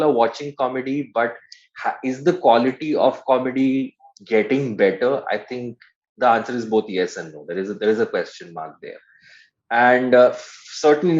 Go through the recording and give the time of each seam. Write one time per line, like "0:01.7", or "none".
none